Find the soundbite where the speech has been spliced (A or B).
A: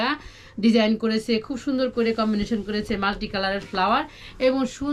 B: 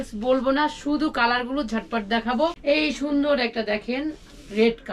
B